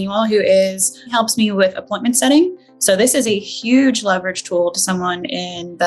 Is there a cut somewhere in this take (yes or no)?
yes